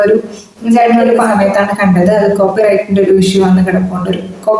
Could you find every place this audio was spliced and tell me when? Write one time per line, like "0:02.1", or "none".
0:01.3